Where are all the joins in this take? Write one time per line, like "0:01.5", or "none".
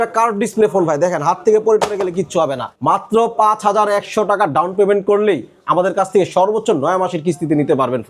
0:02.7